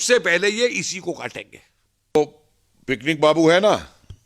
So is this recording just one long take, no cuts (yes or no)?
no